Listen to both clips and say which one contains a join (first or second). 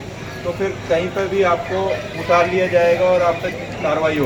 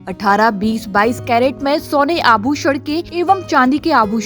second